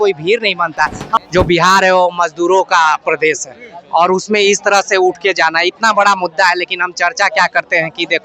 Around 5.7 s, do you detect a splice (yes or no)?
no